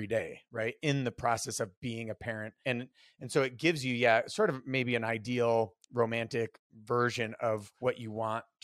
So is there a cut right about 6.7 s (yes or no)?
yes